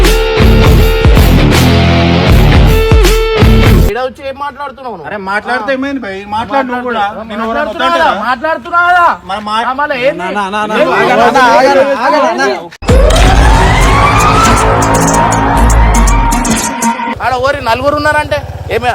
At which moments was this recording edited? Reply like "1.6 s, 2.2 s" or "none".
3.9 s, 17.1 s